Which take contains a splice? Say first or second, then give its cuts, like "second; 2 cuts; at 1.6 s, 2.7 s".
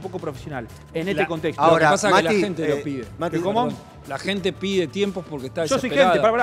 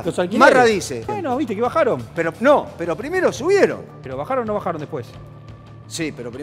second; 2 cuts; at 1.0 s, 4.0 s